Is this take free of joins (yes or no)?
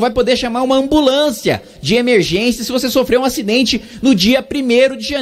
yes